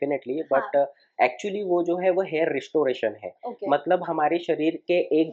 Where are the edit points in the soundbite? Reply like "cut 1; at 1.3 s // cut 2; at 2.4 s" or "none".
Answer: none

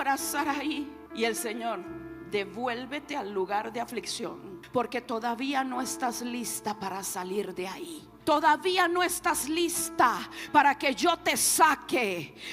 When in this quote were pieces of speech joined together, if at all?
cut 1; at 1.0 s // cut 2; at 4.5 s // cut 3; at 8.0 s

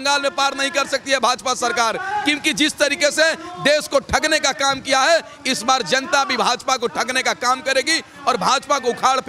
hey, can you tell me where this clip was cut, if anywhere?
none

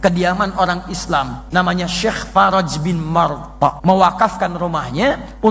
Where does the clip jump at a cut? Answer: cut 1; at 1.4 s // cut 2; at 3.8 s

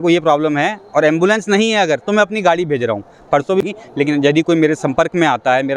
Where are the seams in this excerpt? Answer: cut 1; at 3.6 s

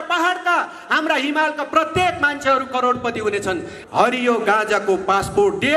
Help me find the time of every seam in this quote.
cut 1; at 3.7 s

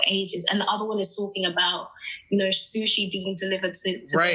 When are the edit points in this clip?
none

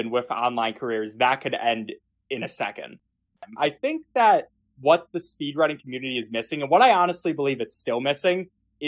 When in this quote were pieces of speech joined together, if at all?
cut 1; at 3.5 s

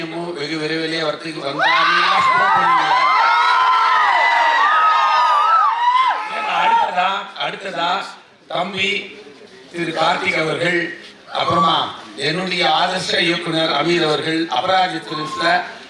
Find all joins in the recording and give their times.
none

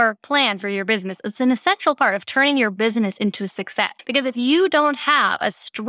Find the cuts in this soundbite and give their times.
cut 1; at 4.0 s

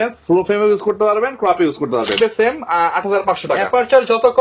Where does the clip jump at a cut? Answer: cut 1; at 2.2 s

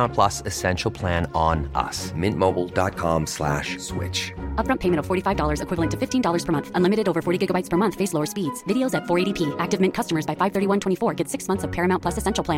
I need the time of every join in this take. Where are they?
none

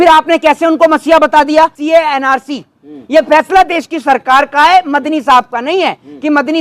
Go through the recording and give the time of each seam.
cut 1; at 1.8 s

